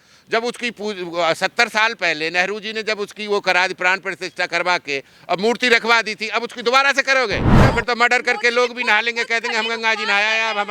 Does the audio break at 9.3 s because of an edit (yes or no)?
no